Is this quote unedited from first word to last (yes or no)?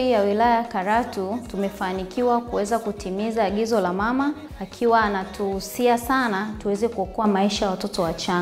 yes